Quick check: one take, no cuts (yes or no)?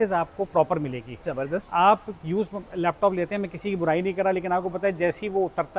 yes